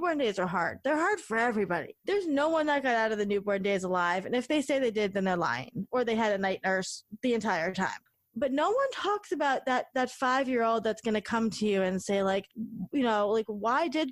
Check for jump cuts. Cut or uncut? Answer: uncut